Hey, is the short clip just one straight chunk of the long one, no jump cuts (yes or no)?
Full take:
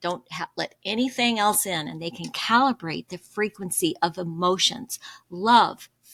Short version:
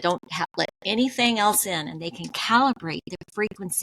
yes